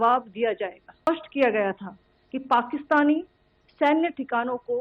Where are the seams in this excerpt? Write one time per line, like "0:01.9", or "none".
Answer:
0:01.1